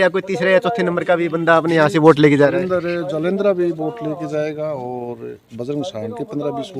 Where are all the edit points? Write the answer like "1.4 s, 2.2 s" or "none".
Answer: none